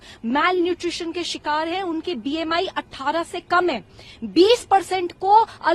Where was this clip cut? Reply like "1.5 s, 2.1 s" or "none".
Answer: none